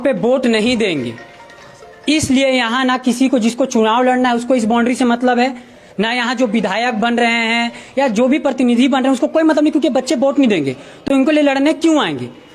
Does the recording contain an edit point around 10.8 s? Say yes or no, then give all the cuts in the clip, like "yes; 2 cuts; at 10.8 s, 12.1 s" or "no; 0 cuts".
no; 0 cuts